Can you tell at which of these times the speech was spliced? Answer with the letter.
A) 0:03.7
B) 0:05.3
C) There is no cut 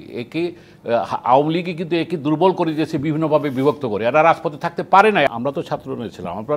B